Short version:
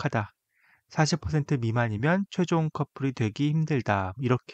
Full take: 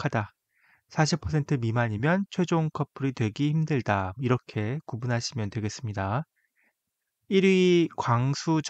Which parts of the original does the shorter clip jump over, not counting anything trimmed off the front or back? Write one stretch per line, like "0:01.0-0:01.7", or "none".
none